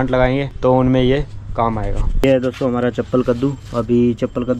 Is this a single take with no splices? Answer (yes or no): no